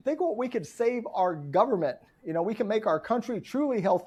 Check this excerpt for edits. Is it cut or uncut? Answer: uncut